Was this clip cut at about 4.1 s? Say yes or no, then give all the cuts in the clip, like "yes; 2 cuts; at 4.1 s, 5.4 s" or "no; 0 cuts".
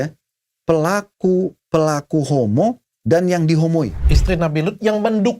yes; 1 cut; at 4.1 s